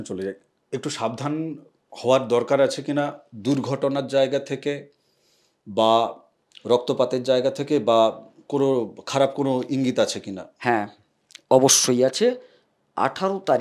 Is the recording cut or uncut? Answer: uncut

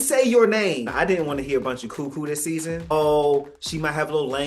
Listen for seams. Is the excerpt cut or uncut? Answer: cut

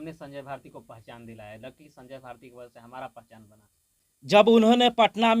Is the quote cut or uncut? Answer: cut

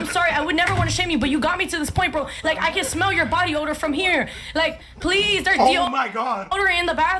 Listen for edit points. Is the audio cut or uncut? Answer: uncut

